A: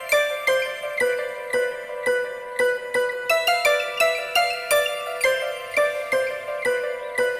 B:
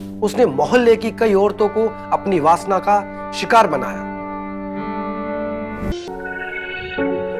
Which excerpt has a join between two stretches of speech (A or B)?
B